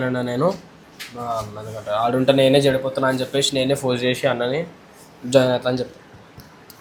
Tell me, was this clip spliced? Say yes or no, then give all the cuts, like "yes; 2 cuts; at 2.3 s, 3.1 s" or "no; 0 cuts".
no; 0 cuts